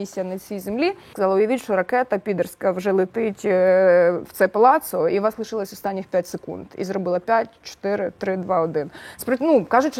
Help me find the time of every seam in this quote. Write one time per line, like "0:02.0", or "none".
0:01.1